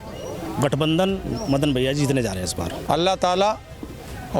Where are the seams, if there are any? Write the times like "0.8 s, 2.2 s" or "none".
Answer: 2.8 s